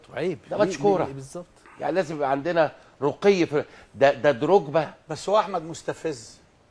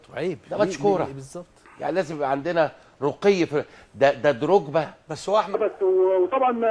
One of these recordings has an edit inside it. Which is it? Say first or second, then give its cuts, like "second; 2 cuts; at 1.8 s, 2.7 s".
first; 1 cut; at 5.5 s